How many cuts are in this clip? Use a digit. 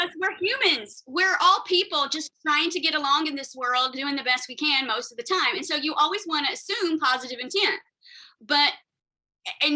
0